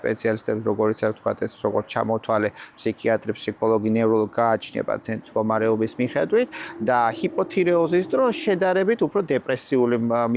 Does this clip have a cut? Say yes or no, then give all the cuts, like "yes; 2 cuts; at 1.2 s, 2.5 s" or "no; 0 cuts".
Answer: no; 0 cuts